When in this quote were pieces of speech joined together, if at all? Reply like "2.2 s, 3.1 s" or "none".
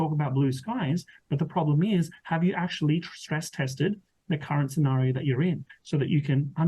5.7 s